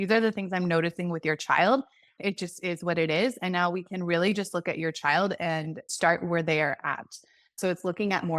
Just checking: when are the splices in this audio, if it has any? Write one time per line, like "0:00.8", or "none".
0:02.1
0:05.9